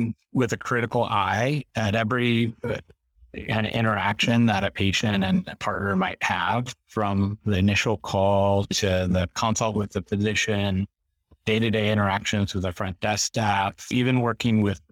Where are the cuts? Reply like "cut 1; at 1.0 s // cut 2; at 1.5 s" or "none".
none